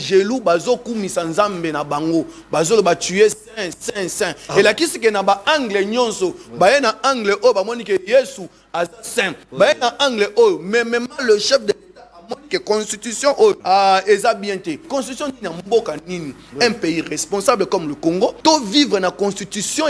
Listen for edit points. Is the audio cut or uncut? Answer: cut